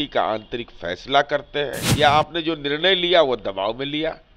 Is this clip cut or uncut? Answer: cut